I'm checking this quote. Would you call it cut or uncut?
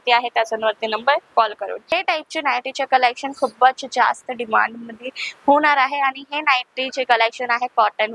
cut